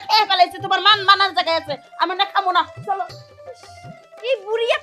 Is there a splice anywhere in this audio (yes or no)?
no